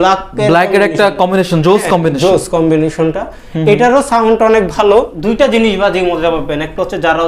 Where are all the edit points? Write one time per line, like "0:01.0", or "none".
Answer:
0:05.1

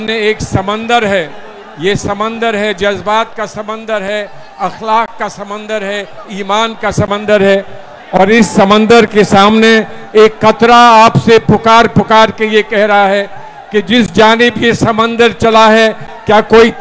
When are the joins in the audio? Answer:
none

